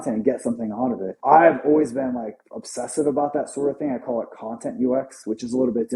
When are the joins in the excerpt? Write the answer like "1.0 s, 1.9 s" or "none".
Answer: 1.2 s